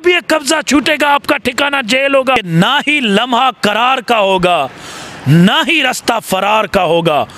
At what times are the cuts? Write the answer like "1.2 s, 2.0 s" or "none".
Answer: 2.4 s